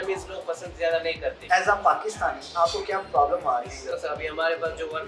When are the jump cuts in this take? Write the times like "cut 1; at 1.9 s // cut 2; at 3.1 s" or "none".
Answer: cut 1; at 1.4 s // cut 2; at 3.9 s